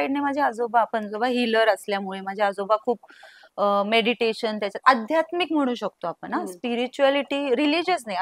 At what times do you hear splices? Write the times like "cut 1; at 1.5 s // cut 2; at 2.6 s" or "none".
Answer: none

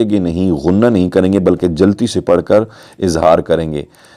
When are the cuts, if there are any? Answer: none

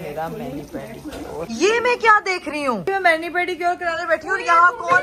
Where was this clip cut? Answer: none

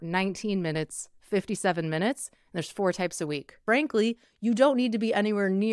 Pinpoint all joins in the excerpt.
cut 1; at 3.6 s

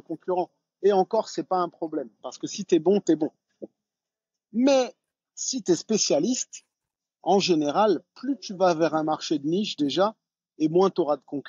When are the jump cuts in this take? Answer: none

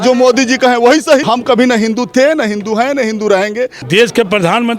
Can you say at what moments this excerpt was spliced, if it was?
cut 1; at 1.2 s // cut 2; at 3.8 s

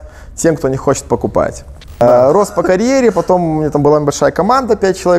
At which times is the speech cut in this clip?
cut 1; at 2.0 s

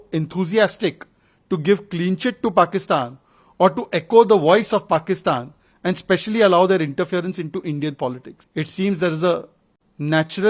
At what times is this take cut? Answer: cut 1; at 8.3 s

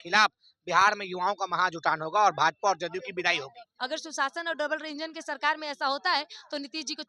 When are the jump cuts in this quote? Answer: cut 1; at 3.6 s

